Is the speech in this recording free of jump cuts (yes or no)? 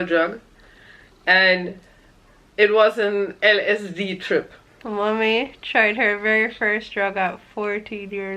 no